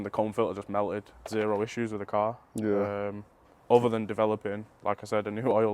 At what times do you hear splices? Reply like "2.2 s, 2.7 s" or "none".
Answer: 1.3 s